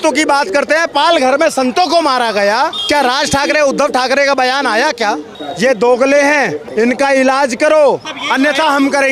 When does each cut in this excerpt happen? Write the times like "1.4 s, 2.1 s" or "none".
2.8 s, 6.6 s, 8.2 s